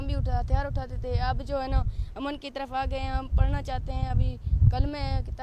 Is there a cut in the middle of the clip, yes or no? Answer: no